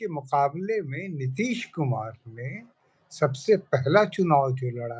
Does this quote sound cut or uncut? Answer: uncut